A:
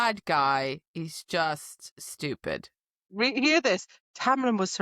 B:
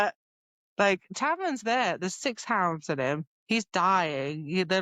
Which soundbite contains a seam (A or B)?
A